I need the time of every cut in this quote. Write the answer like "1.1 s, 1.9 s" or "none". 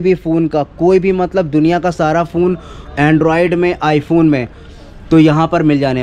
none